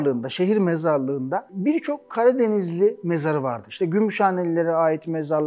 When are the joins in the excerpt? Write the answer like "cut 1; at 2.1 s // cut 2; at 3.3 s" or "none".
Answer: none

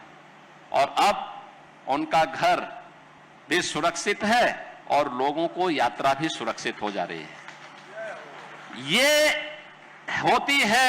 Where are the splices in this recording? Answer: none

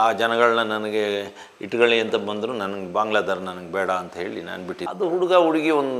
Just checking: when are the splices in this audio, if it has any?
cut 1; at 4.9 s

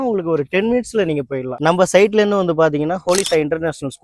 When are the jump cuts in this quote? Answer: cut 1; at 1.5 s

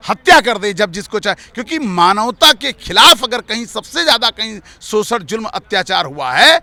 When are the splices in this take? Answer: none

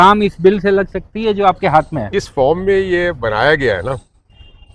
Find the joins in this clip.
cut 1; at 2.1 s

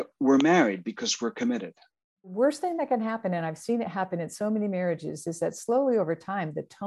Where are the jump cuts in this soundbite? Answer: cut 1; at 2.3 s

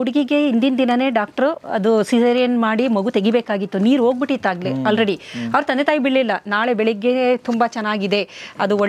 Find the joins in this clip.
none

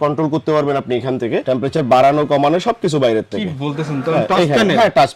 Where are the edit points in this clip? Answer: none

